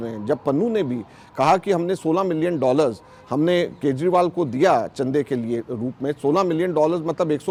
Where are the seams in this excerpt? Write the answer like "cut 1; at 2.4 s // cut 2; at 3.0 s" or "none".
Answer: none